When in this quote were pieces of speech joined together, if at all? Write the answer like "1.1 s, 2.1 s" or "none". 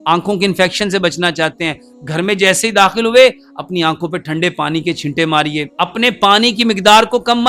5.7 s